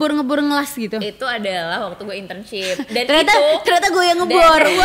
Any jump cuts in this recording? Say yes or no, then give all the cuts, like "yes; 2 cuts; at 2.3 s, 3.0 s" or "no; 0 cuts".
no; 0 cuts